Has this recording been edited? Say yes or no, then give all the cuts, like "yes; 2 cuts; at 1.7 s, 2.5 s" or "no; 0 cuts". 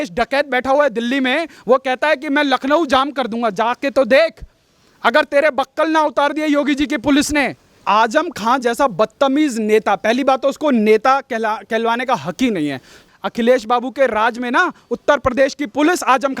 yes; 2 cuts; at 7.8 s, 13.1 s